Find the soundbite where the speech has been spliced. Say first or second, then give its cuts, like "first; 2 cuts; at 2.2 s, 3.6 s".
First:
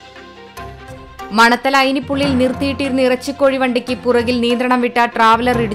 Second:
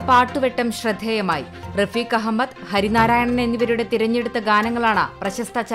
first; 1 cut; at 1.0 s